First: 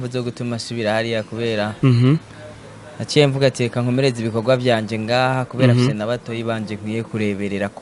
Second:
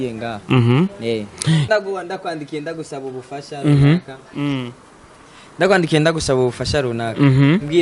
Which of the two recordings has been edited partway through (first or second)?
second